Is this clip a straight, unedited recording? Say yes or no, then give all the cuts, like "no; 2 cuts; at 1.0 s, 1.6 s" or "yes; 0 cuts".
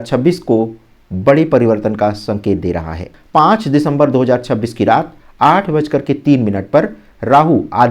no; 1 cut; at 3.1 s